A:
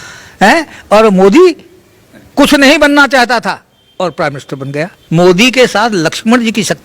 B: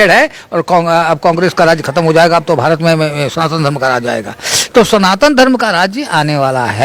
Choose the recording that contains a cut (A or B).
A